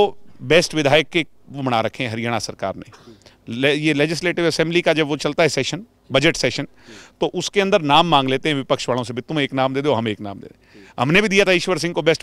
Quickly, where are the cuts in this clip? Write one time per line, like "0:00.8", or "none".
none